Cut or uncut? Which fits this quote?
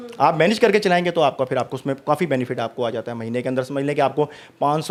uncut